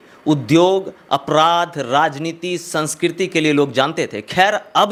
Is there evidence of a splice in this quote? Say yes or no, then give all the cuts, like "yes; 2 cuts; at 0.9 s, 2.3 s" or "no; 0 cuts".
no; 0 cuts